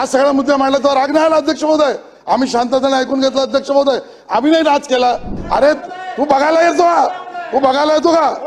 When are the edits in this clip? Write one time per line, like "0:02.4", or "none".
0:05.4